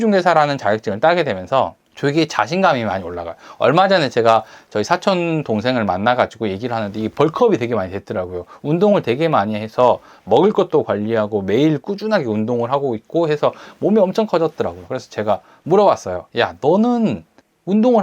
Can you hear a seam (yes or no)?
yes